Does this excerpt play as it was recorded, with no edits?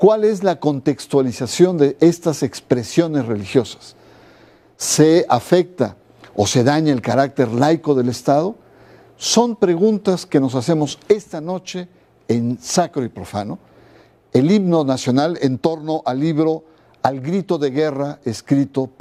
yes; 0 cuts

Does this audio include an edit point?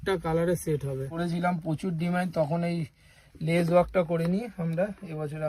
yes; 1 cut; at 1.2 s

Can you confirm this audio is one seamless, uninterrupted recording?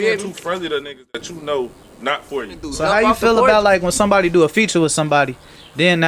no; 1 cut; at 2.7 s

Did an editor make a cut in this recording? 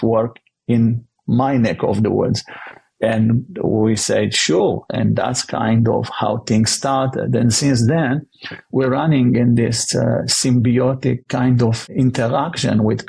yes; 1 cut; at 11.8 s

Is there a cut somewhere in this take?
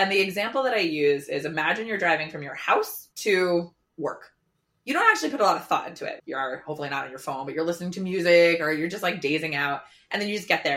yes; 2 cuts; at 3.8 s, 6.1 s

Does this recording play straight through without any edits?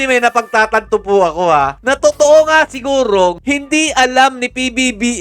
yes; 0 cuts

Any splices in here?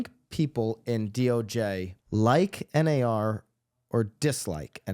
yes; 1 cut; at 1.9 s

